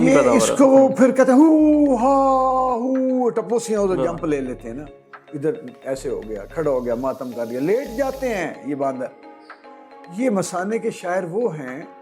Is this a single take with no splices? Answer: yes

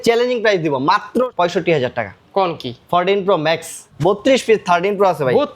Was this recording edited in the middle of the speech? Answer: yes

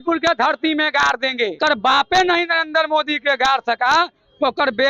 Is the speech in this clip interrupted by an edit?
yes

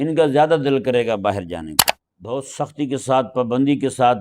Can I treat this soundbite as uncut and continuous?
no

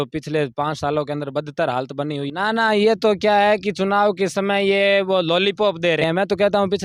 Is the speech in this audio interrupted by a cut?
yes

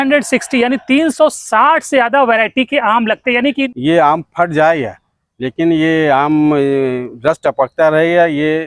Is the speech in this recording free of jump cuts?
no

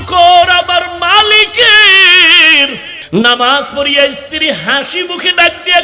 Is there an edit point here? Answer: yes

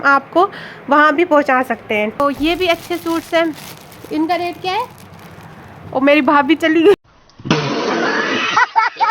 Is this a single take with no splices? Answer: no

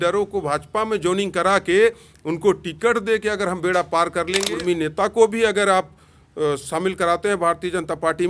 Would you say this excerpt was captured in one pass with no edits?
no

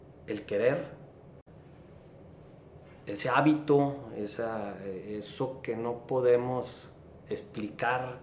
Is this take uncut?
yes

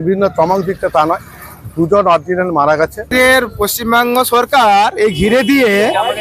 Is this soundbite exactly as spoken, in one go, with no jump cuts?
no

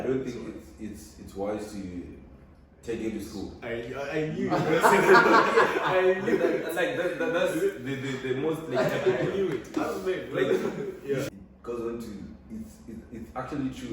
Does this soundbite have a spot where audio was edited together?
yes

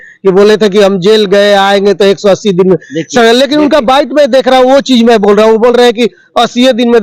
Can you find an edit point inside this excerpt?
no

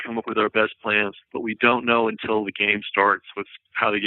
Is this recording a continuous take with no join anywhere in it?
no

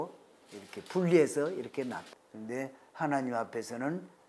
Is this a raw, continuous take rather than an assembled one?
no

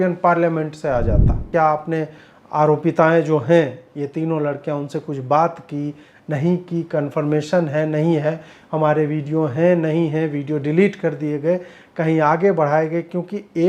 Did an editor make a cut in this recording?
yes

